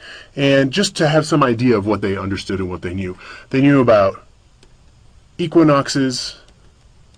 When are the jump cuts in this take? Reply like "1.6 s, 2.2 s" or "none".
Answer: 2.4 s